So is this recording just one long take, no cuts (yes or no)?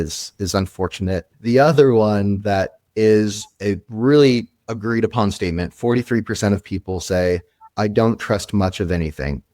no